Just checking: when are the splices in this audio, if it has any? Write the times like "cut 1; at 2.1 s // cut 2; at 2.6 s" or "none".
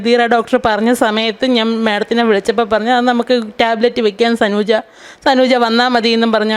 none

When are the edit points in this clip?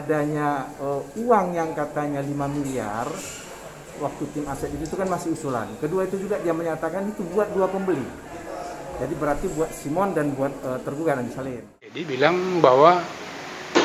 cut 1; at 12.0 s

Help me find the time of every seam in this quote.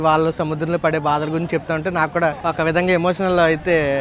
cut 1; at 2.4 s

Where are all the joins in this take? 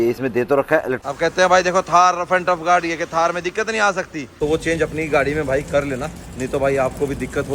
cut 1; at 1.0 s // cut 2; at 4.2 s

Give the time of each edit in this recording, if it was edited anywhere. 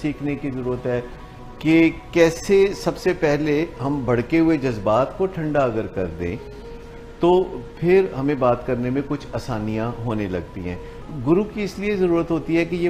cut 1; at 11.0 s

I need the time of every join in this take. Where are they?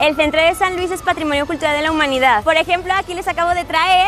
cut 1; at 2.4 s

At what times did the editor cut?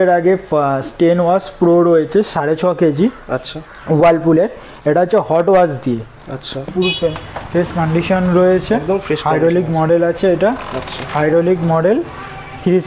cut 1; at 6.6 s

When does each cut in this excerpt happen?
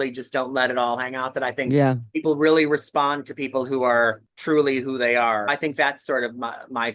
cut 1; at 4.3 s // cut 2; at 5.5 s

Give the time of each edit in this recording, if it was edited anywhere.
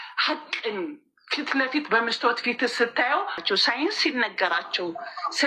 cut 1; at 3.4 s

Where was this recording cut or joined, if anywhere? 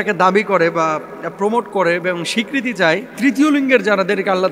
cut 1; at 3.1 s

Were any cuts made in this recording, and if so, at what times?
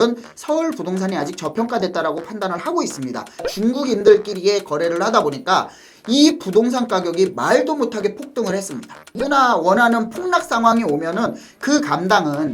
cut 1; at 3.5 s // cut 2; at 9.1 s

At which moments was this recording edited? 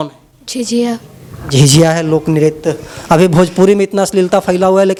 none

